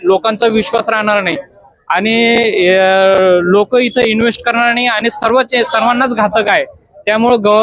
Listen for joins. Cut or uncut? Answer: uncut